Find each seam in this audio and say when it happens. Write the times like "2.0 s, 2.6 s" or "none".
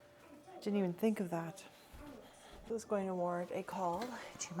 2.6 s